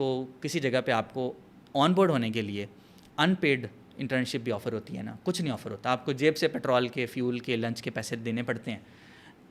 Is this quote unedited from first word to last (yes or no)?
yes